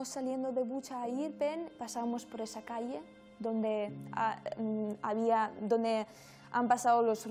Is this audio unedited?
yes; 0 cuts

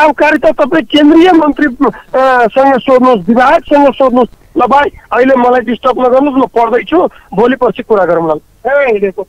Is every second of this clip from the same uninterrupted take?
no; 1 cut; at 4.3 s

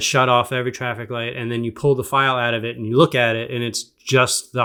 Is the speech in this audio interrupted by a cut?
no; 0 cuts

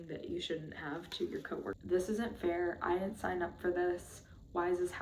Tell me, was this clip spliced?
yes; 1 cut; at 1.8 s

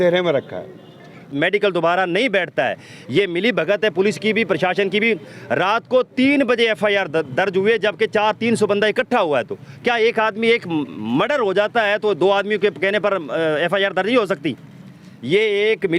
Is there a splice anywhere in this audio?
yes; 1 cut; at 1.3 s

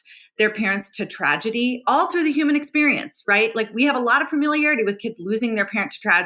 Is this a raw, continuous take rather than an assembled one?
yes; 0 cuts

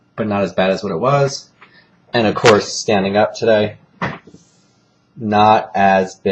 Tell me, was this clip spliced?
yes; 1 cut; at 1.5 s

